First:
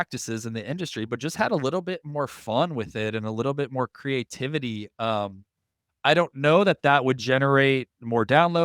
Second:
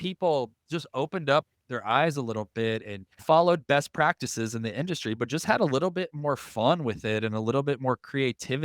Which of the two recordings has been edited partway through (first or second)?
second